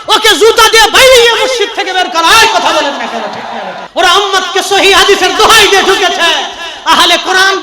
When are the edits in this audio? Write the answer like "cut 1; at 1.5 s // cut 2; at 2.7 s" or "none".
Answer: cut 1; at 3.8 s